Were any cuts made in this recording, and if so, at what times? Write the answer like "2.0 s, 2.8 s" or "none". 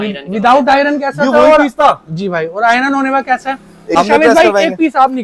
4.0 s